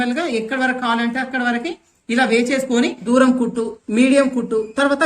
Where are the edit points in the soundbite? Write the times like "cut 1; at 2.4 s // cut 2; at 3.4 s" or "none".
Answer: cut 1; at 3.0 s